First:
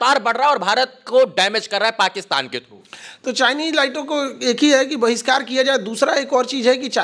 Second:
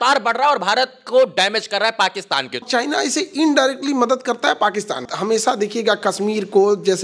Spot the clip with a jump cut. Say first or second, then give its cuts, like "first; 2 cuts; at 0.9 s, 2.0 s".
second; 2 cuts; at 2.7 s, 5.1 s